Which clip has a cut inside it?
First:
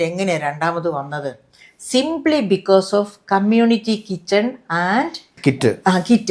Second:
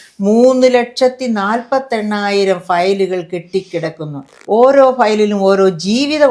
second; 1 cut; at 4.3 s

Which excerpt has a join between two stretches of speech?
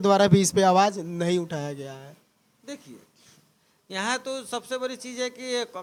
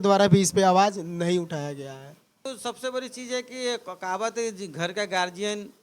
second; 1 cut; at 2.5 s

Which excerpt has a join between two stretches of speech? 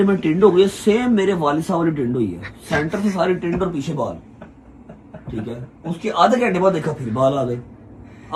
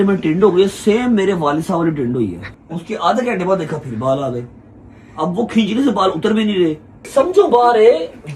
second; 2 cuts; at 2.5 s, 6.9 s

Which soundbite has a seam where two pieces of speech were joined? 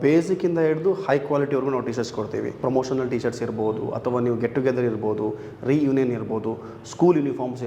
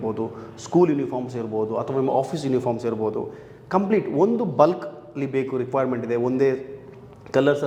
first; 1 cut; at 2.6 s

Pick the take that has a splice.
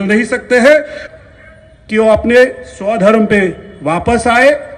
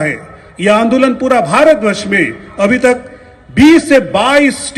first; 1 cut; at 1.0 s

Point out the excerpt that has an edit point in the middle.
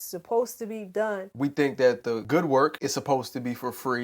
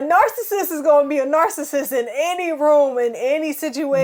first; 3 cuts; at 1.2 s, 2.2 s, 2.8 s

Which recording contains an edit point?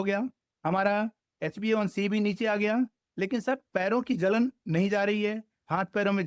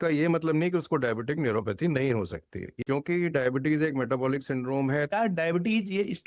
second; 2 cuts; at 2.8 s, 5.1 s

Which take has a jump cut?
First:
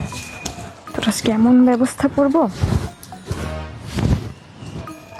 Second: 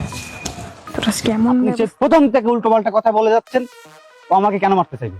second; 1 cut; at 1.7 s

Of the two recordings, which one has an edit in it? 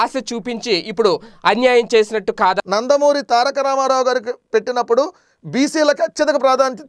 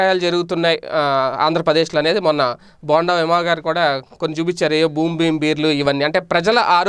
first; 1 cut; at 2.6 s

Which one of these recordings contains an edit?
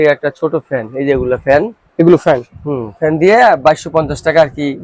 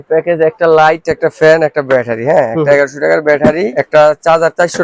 second; 1 cut; at 3.8 s

